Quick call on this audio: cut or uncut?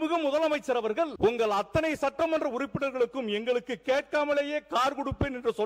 cut